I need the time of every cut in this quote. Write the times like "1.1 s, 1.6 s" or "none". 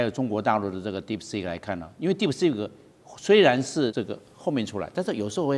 3.9 s